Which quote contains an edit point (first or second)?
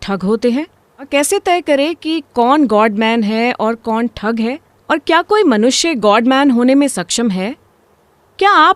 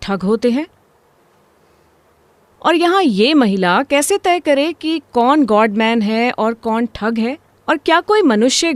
first